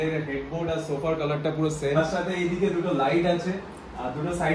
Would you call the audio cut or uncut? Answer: uncut